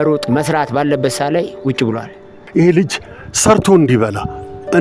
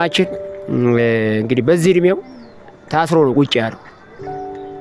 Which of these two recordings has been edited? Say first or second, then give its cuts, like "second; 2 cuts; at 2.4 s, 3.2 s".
first; 1 cut; at 2.4 s